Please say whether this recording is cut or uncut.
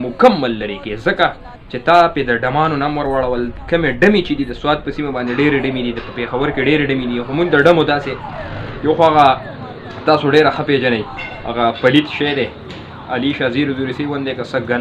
uncut